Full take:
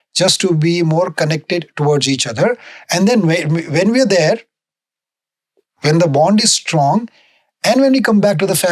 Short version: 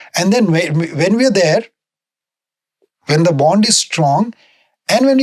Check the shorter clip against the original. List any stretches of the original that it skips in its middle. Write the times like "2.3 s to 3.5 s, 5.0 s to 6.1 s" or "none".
none